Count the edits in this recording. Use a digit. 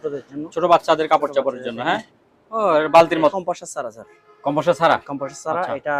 1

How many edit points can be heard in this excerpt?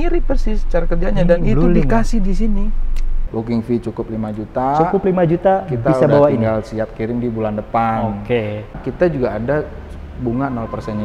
2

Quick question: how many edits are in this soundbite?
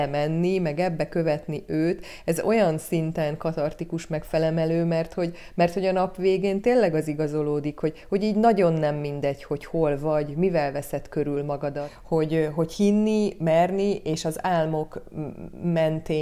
1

